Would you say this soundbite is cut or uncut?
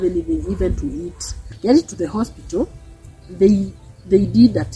cut